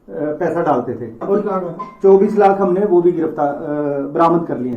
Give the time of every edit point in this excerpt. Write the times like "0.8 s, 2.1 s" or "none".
1.2 s